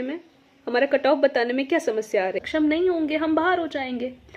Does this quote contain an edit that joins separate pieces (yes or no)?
yes